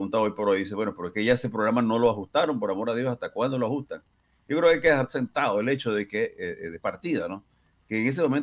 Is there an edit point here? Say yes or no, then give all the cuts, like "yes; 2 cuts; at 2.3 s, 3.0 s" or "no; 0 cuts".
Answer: no; 0 cuts